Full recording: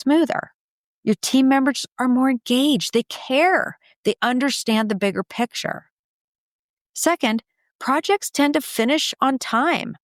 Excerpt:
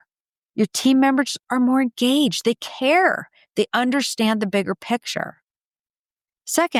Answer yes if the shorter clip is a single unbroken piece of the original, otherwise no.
yes